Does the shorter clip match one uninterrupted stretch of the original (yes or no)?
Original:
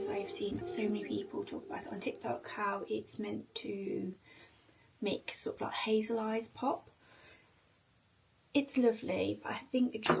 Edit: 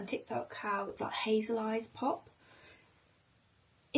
no